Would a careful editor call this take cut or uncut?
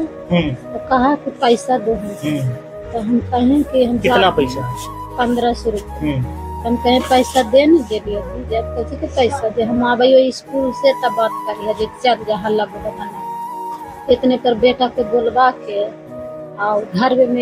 uncut